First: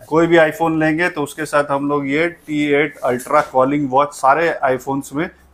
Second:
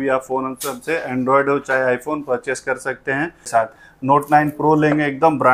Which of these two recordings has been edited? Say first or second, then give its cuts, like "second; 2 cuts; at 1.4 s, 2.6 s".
second; 1 cut; at 3.6 s